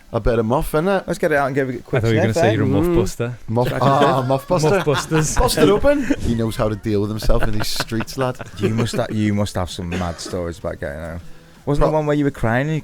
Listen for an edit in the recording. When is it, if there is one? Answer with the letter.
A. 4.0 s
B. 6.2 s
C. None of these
B